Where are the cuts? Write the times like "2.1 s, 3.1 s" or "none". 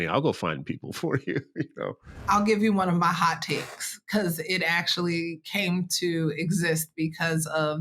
2.2 s

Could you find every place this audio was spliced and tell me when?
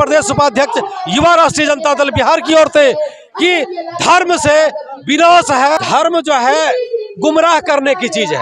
5.8 s

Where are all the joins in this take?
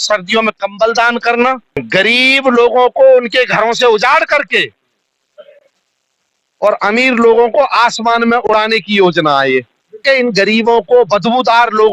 1.8 s, 10.0 s

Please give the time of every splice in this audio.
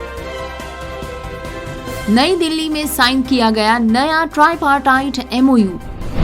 2.0 s

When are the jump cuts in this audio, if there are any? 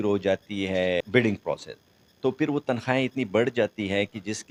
none

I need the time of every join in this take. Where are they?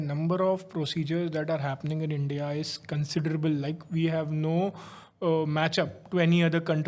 none

